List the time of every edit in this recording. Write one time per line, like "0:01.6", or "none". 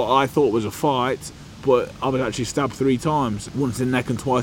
0:01.3
0:03.4